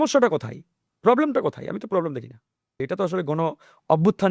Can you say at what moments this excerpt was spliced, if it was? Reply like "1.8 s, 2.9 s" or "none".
2.8 s